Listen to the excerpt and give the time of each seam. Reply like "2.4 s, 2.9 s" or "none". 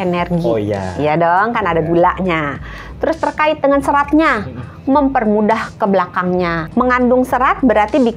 6.6 s